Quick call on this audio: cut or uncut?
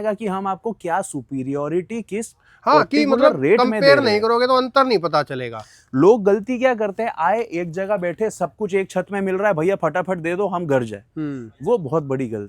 uncut